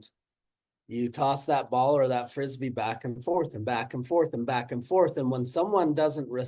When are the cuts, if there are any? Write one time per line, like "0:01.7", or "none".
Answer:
none